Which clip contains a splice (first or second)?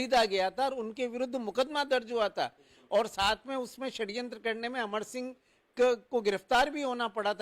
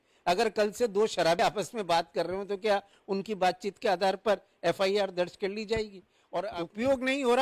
second